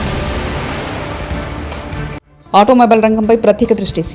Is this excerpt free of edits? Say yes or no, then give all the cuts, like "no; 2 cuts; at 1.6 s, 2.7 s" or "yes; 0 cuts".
yes; 0 cuts